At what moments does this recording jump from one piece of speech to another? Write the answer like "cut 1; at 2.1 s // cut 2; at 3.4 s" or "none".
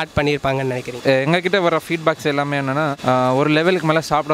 cut 1; at 0.9 s